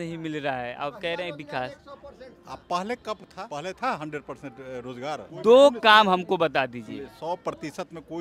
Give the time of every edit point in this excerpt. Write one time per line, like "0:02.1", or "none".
0:03.3
0:05.3